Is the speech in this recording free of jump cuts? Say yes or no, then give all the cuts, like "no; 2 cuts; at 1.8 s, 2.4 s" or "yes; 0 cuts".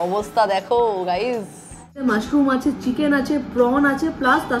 no; 1 cut; at 2.0 s